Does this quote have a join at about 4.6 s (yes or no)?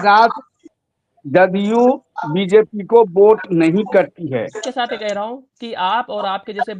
yes